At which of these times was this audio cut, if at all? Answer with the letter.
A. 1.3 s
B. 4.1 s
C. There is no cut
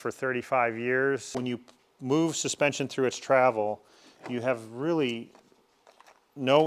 A